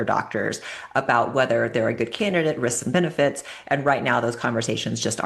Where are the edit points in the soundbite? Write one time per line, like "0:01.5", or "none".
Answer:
none